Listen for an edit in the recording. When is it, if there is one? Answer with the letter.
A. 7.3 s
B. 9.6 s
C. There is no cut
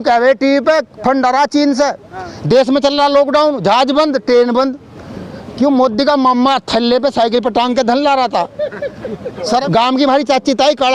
B